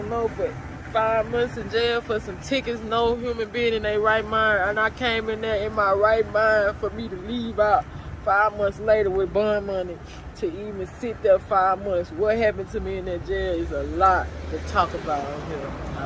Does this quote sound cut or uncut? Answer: uncut